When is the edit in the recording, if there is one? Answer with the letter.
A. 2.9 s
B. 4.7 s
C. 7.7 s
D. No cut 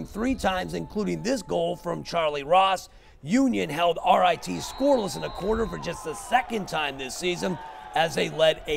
B